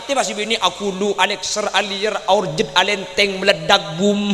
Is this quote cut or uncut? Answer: uncut